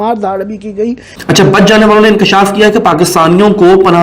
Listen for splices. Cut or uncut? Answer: cut